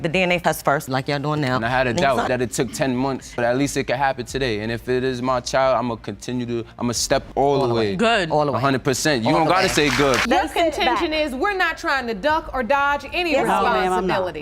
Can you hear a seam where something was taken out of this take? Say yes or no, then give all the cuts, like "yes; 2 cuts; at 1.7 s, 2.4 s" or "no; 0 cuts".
yes; 3 cuts; at 0.8 s, 2.3 s, 10.2 s